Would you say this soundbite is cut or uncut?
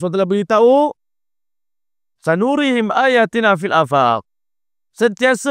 uncut